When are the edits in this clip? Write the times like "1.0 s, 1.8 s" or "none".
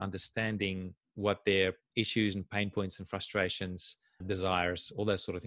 1.0 s, 1.8 s